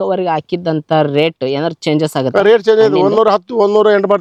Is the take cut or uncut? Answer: uncut